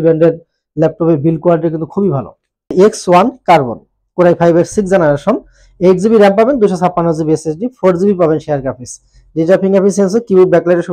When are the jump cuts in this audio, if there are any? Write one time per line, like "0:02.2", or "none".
0:02.7